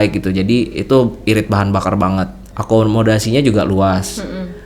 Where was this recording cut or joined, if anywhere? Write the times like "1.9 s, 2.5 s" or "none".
2.5 s